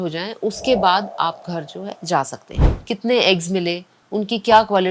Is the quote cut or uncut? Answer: cut